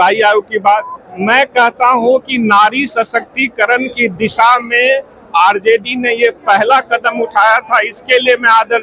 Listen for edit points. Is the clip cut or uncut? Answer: uncut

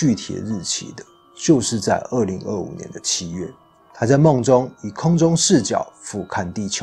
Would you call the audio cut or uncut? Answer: uncut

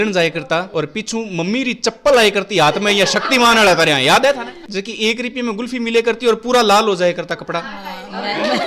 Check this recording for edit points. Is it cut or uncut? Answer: cut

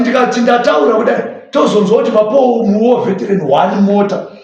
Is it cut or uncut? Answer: uncut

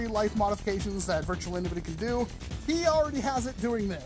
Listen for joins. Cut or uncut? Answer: cut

